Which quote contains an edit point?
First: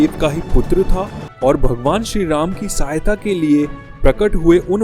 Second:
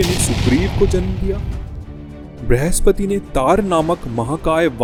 first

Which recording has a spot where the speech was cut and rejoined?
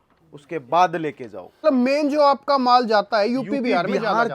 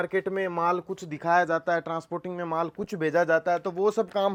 first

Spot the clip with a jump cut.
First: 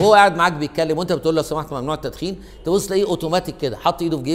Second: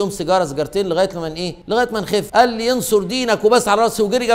second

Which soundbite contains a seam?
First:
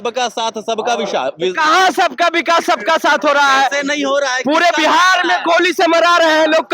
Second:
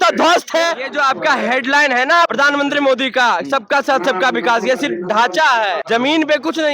second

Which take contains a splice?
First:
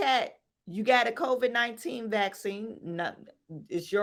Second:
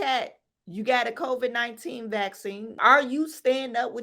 second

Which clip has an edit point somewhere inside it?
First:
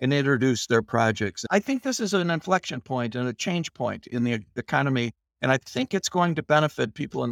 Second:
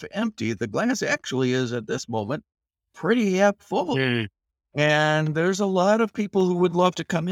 first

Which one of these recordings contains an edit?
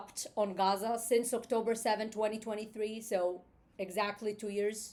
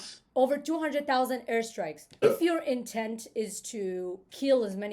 second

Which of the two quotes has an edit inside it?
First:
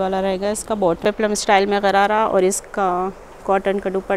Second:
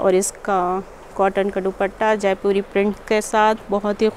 first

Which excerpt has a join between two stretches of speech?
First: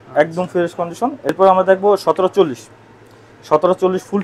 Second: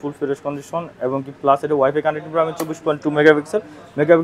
first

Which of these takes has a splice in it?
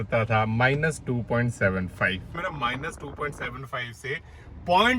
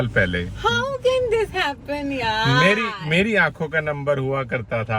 first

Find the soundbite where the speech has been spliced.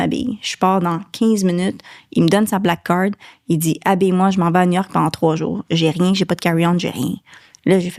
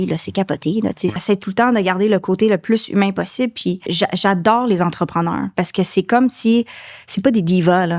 second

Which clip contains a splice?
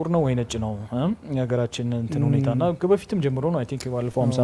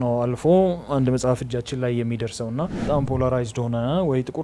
second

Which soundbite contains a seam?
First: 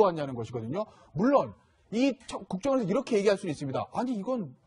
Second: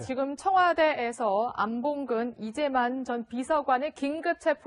first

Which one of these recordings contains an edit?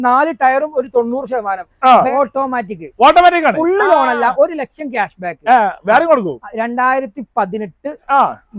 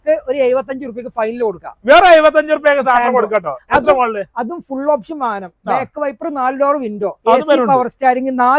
first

